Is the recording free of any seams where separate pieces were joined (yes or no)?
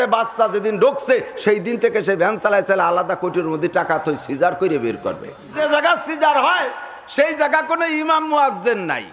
no